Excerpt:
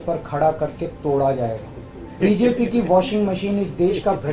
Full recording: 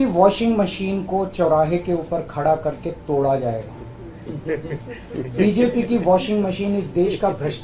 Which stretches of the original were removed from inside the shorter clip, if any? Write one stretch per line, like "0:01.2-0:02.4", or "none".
0:04.2-0:05.3